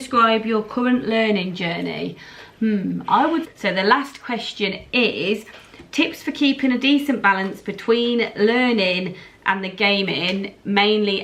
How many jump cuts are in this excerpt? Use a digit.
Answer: 1